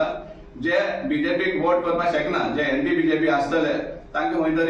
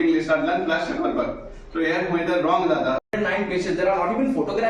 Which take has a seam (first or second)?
second